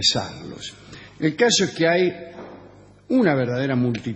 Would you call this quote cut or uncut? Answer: uncut